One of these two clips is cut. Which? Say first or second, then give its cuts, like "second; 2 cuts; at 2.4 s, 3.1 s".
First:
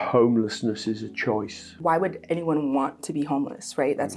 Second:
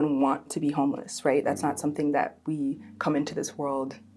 first; 1 cut; at 1.6 s